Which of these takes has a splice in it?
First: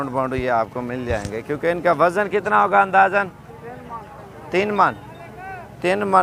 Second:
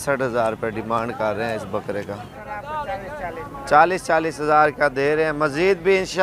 second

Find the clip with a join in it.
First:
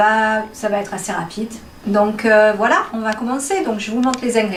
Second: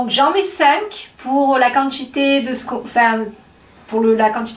second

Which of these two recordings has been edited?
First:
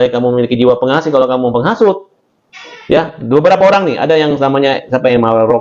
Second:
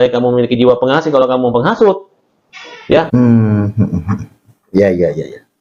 first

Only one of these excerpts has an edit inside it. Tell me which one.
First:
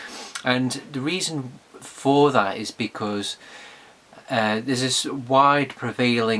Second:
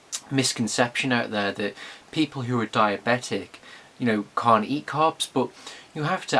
first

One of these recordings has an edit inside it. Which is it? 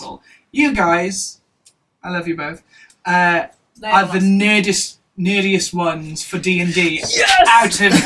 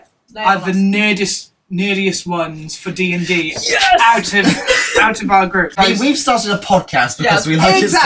second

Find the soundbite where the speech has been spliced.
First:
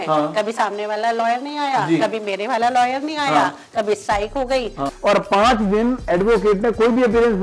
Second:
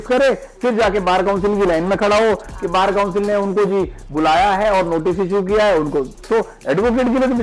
first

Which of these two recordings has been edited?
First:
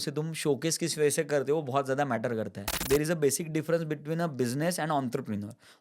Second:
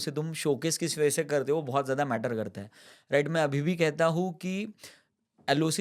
first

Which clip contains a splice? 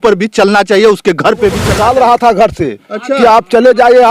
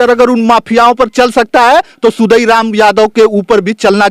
first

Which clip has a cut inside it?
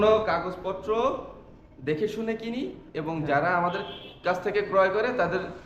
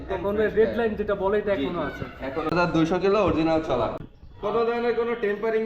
second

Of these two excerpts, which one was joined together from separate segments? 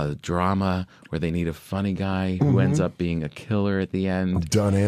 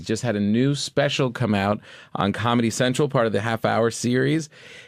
first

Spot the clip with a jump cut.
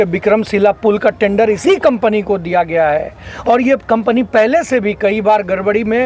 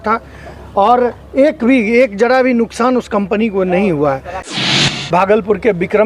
second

